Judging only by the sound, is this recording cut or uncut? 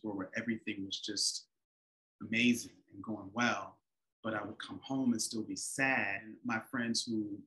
cut